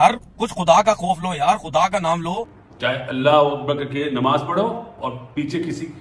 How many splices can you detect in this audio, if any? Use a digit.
1